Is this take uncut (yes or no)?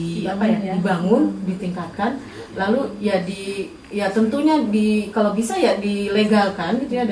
yes